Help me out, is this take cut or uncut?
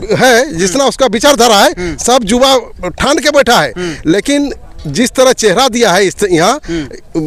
uncut